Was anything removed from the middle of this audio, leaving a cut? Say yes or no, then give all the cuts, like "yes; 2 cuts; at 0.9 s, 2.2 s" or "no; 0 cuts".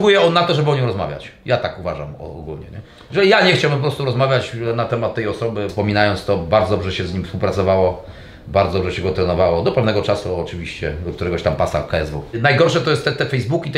yes; 2 cuts; at 5.7 s, 12.4 s